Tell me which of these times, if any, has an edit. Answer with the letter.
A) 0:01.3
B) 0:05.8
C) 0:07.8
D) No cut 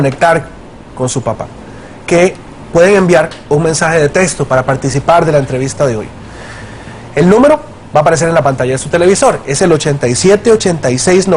B